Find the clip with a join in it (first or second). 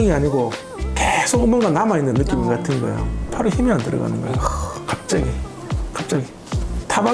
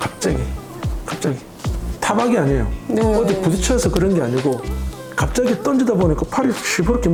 first